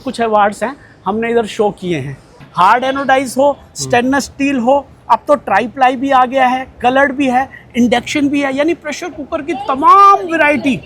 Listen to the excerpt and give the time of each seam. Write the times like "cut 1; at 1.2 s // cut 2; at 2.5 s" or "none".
cut 1; at 2.4 s